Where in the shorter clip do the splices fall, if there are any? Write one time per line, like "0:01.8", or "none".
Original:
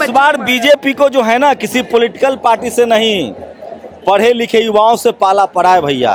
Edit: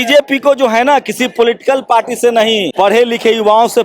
0:02.7